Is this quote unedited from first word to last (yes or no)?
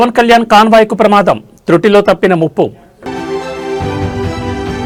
yes